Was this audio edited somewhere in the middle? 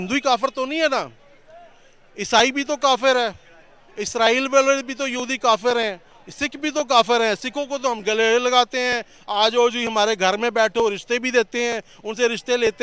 no; 0 cuts

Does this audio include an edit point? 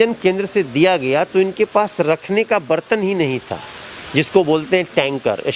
no; 0 cuts

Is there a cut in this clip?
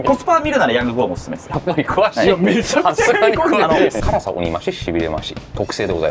yes; 2 cuts; at 1.5 s, 4.0 s

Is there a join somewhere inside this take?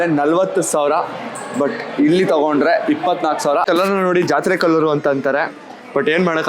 yes; 1 cut; at 3.7 s

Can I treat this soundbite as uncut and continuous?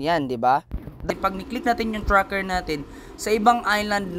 no; 1 cut; at 1.0 s

